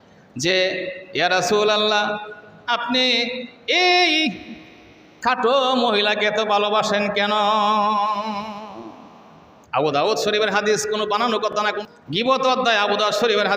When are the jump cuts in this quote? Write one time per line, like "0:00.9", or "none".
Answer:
0:11.5